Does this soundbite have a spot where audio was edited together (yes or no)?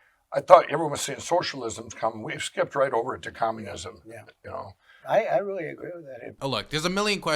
yes